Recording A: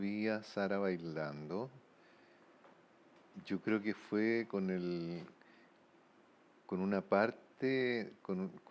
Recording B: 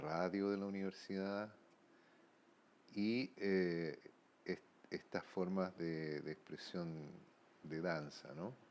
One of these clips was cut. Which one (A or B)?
B